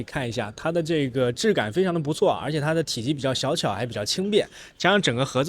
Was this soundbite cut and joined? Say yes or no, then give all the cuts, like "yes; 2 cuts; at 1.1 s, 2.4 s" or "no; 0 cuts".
no; 0 cuts